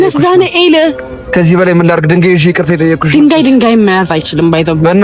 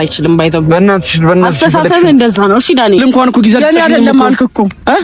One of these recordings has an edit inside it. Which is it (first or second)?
second